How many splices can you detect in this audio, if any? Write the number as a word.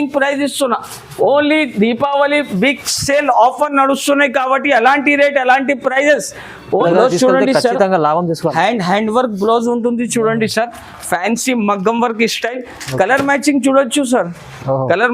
one